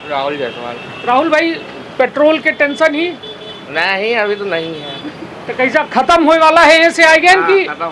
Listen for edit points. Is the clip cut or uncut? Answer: uncut